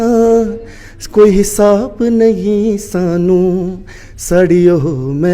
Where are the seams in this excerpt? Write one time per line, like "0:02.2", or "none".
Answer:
none